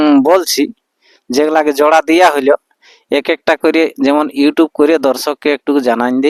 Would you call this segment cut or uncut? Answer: uncut